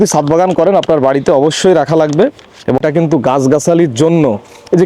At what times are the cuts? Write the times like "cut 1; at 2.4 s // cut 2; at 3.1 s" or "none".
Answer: cut 1; at 2.8 s